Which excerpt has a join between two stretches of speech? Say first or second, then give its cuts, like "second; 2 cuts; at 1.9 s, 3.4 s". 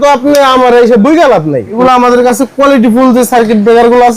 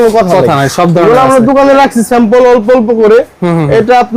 first; 1 cut; at 1.7 s